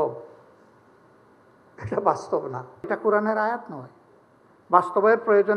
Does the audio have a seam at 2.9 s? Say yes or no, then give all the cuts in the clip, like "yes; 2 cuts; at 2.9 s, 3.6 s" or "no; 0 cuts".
yes; 1 cut; at 2.9 s